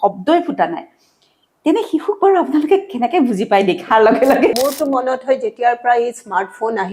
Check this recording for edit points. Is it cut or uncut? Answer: cut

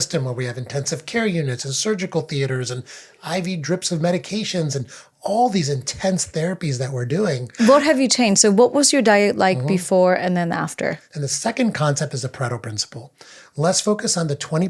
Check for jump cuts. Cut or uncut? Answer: cut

